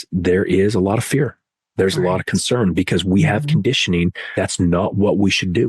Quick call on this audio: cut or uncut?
cut